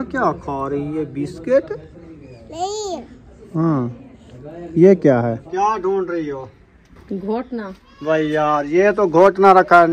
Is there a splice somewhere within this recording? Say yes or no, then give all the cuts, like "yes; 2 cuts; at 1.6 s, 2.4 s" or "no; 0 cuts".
yes; 2 cuts; at 5.4 s, 7.8 s